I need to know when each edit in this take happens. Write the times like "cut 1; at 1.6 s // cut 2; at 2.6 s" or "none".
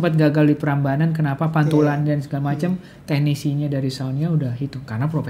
none